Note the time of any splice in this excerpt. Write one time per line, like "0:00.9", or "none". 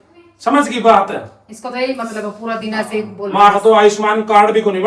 none

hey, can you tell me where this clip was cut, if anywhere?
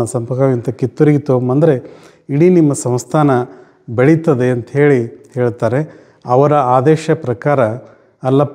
none

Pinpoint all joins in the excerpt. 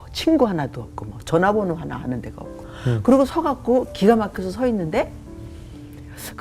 0:02.7

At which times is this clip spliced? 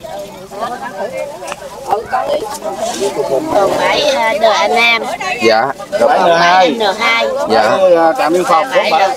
0:03.5

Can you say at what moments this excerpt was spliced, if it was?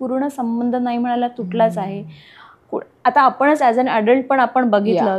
none

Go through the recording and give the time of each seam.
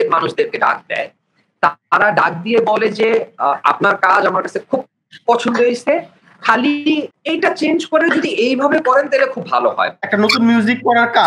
0:07.2
0:09.9

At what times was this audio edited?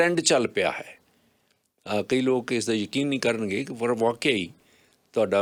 none

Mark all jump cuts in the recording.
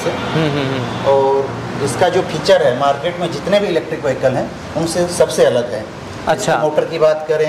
none

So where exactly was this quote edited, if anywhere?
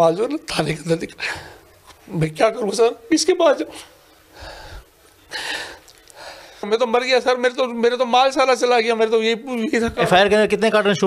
0:06.7

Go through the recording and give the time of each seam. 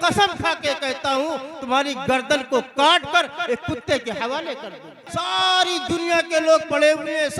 0:05.0

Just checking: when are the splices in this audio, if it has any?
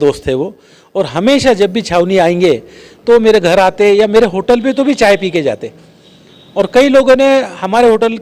none

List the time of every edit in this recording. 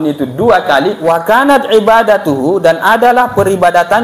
0:01.0

